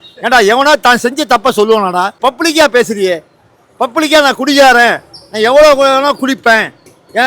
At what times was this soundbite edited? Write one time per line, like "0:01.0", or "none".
0:02.2